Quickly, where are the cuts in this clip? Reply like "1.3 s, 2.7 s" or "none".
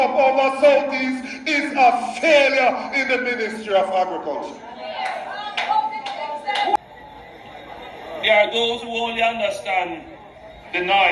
6.8 s